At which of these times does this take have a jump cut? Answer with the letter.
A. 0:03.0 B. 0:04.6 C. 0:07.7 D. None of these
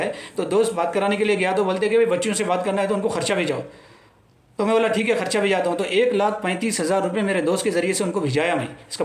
D